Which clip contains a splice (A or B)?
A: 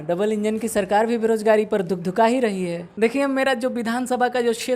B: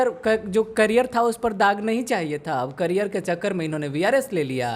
A